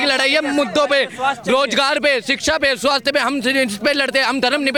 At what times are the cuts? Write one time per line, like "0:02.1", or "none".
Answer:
none

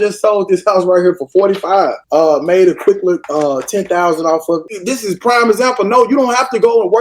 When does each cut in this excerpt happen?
0:02.0
0:03.3
0:04.8

